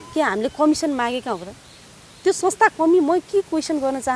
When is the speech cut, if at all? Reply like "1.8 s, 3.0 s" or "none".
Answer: none